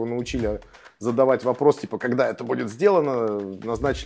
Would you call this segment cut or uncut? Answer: uncut